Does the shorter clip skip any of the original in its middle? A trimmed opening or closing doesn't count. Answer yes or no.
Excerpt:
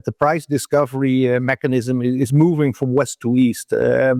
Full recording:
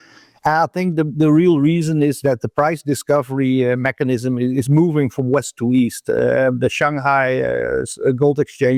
no